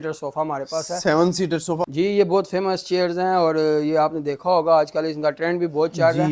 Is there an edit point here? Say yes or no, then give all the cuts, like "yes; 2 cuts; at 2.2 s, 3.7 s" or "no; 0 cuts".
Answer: yes; 1 cut; at 1.8 s